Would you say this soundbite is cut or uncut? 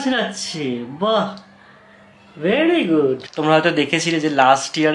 cut